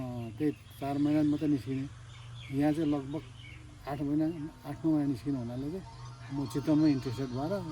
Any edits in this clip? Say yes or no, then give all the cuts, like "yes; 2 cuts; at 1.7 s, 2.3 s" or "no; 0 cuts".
no; 0 cuts